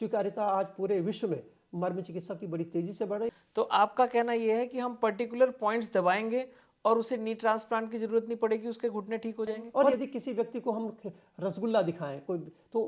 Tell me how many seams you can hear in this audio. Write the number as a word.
two